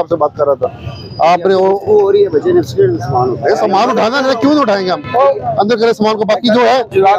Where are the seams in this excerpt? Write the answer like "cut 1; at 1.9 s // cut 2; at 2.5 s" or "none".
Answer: none